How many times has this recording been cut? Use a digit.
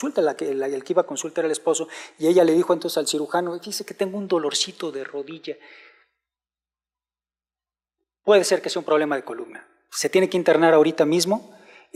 0